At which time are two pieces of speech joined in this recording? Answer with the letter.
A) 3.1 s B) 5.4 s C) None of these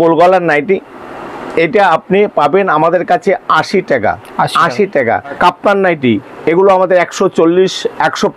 B